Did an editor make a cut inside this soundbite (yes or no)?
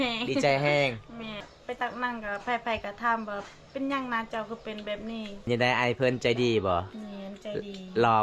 yes